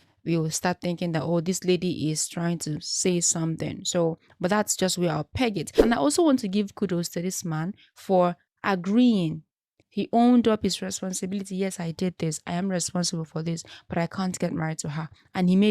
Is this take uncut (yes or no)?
no